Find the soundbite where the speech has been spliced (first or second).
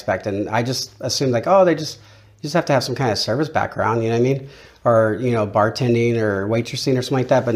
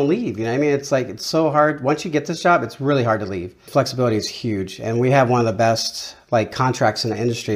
second